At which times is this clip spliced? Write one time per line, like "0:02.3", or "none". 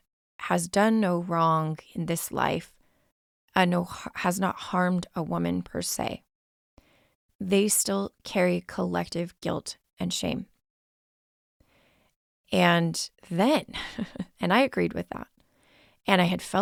none